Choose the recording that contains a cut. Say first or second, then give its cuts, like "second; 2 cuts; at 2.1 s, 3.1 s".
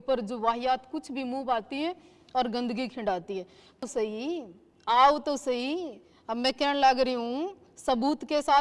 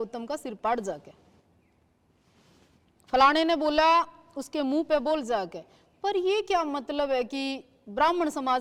first; 1 cut; at 3.9 s